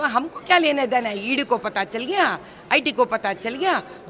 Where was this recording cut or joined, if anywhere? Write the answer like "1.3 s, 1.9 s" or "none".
none